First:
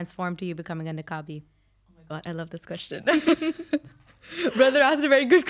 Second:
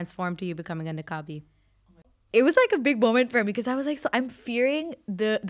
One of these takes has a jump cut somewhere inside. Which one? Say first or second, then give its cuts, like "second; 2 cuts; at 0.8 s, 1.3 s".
second; 1 cut; at 2.1 s